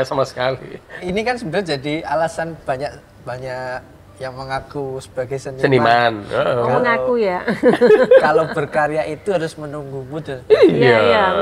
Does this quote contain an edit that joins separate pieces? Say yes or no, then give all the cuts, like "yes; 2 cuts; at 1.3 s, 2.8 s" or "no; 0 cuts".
yes; 1 cut; at 1.0 s